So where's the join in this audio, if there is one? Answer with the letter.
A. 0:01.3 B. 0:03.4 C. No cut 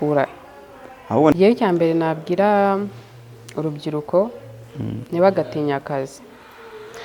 A